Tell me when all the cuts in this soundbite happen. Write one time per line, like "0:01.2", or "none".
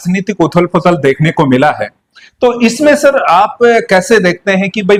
none